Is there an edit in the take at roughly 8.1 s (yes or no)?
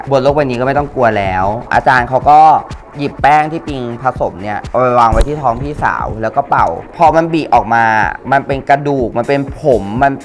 no